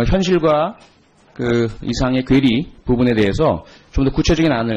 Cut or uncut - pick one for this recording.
cut